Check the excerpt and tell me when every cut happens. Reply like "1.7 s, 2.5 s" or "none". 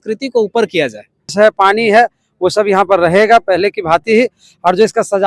1.3 s